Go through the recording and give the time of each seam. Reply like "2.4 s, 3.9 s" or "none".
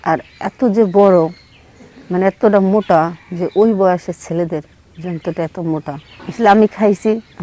6.1 s